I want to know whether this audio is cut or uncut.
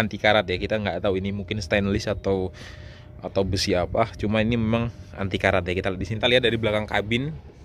cut